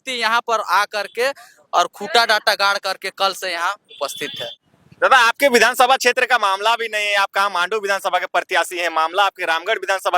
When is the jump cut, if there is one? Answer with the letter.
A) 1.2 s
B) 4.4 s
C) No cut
B